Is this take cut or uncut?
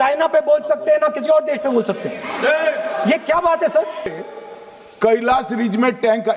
cut